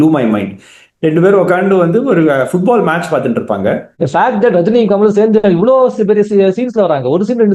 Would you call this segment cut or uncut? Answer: cut